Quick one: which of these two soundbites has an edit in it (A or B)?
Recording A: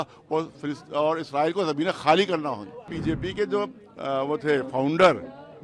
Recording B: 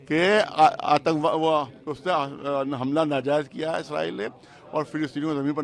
A